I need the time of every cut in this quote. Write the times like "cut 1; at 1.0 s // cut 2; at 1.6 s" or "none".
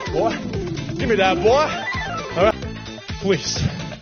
cut 1; at 2.5 s